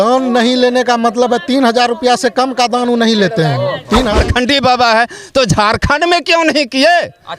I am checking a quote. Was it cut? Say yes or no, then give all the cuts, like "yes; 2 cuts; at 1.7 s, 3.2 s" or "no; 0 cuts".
yes; 1 cut; at 4.1 s